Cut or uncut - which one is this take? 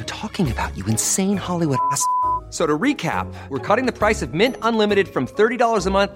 uncut